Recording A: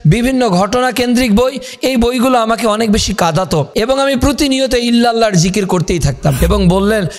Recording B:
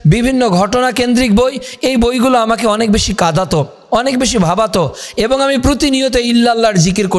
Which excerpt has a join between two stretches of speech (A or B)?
A